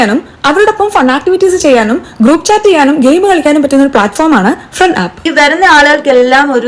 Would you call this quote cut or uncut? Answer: cut